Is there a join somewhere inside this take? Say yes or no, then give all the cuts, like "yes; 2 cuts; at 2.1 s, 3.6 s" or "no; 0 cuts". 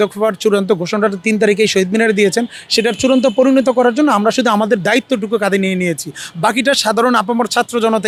no; 0 cuts